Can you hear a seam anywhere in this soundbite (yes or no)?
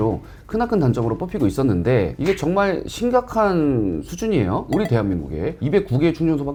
no